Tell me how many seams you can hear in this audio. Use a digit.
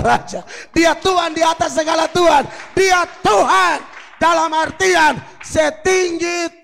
0